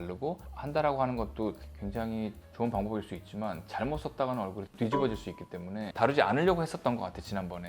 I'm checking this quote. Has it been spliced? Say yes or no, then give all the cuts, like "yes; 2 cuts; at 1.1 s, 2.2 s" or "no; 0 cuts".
yes; 1 cut; at 5.9 s